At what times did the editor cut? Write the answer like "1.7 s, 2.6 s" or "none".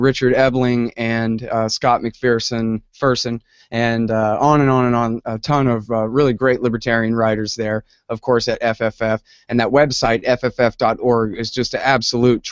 3.6 s